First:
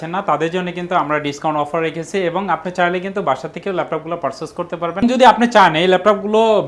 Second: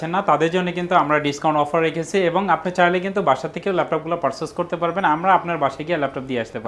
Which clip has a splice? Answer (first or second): first